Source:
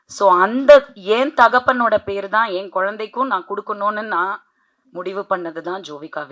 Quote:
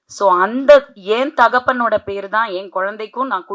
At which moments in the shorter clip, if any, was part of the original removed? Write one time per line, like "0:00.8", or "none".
none